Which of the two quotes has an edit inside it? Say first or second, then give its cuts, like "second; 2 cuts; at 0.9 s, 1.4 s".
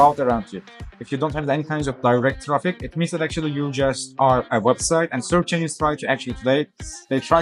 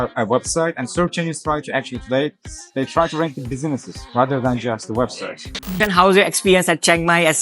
second; 1 cut; at 5.8 s